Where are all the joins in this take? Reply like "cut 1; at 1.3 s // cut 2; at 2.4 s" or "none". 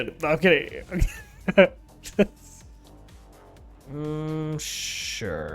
cut 1; at 2.3 s // cut 2; at 3.8 s